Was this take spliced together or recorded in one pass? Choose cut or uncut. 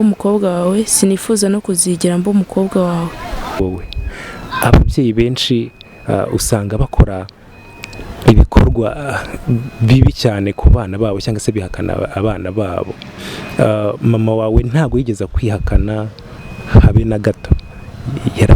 cut